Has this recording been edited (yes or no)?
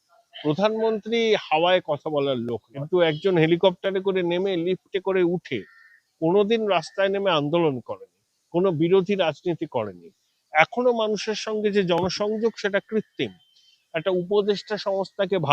yes